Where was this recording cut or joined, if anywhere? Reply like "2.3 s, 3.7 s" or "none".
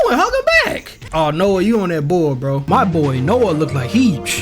2.6 s